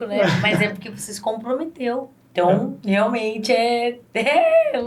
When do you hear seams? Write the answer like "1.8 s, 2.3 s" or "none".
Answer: none